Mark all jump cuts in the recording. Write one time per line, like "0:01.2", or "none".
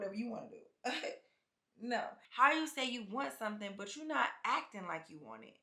0:02.2